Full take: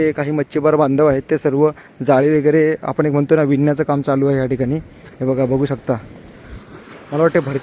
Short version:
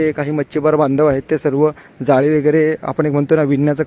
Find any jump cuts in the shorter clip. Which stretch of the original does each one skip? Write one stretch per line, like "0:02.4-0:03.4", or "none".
none